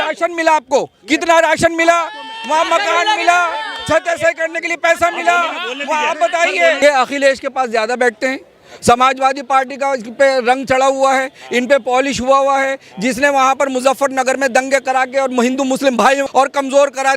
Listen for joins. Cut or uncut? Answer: cut